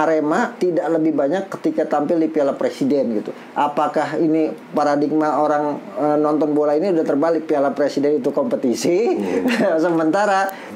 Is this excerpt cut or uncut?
uncut